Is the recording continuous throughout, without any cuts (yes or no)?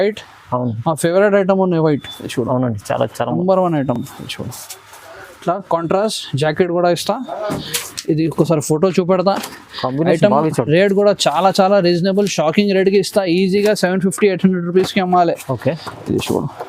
yes